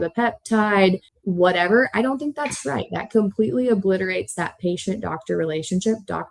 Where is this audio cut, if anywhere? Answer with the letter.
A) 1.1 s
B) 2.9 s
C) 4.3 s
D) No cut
A